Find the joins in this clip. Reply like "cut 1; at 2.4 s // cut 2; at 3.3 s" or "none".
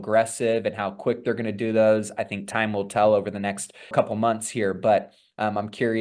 cut 1; at 3.9 s